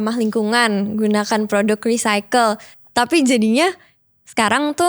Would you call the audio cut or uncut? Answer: cut